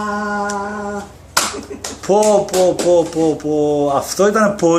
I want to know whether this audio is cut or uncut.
uncut